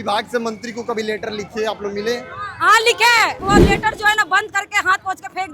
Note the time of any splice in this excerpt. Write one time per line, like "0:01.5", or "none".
0:03.4